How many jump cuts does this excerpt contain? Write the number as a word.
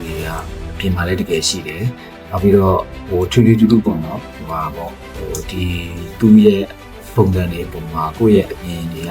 zero